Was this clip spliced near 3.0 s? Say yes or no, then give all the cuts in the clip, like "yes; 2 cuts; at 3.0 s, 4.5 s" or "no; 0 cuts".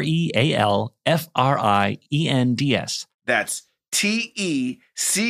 yes; 1 cut; at 3.0 s